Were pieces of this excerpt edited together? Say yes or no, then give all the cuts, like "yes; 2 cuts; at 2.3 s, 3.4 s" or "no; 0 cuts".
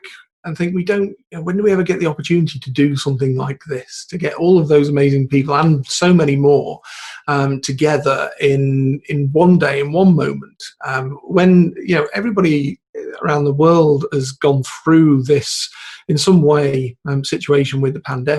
no; 0 cuts